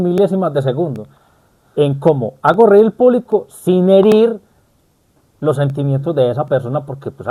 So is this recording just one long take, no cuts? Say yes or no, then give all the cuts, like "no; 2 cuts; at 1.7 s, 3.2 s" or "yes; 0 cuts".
yes; 0 cuts